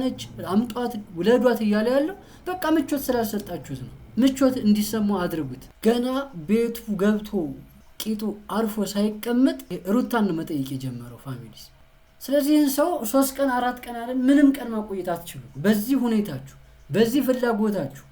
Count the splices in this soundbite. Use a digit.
1